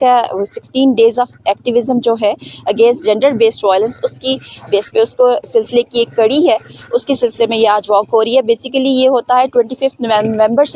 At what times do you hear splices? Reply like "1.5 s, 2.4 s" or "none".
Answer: none